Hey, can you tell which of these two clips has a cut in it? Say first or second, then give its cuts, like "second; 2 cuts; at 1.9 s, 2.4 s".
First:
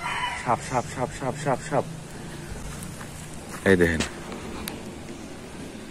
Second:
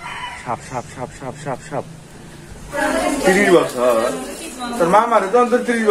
second; 1 cut; at 2.8 s